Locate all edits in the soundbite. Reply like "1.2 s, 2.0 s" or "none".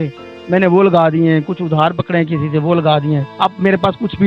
3.3 s